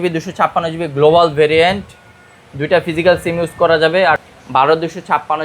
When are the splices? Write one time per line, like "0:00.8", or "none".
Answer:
0:04.2